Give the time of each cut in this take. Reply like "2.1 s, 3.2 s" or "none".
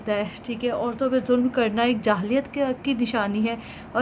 none